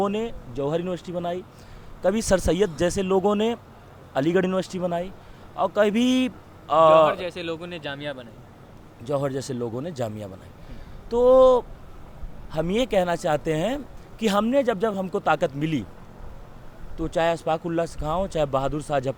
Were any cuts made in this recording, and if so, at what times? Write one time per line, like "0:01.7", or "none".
none